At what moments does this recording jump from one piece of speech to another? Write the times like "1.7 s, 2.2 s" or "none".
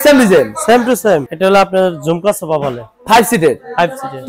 1.3 s